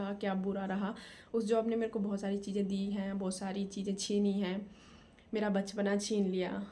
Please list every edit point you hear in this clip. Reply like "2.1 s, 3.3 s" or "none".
none